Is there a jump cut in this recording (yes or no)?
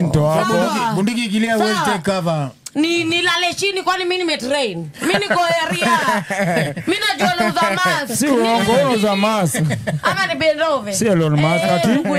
no